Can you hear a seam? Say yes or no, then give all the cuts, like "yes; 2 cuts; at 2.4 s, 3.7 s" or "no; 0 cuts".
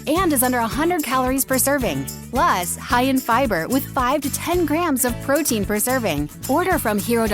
yes; 2 cuts; at 2.1 s, 6.4 s